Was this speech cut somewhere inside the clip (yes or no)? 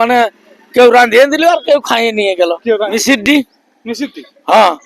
yes